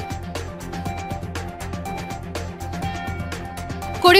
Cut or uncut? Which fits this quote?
uncut